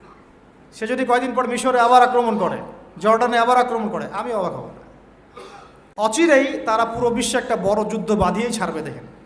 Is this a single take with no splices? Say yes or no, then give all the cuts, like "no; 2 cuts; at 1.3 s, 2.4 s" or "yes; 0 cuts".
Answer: no; 1 cut; at 6.1 s